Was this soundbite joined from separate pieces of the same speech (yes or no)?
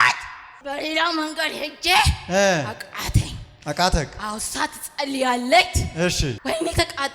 no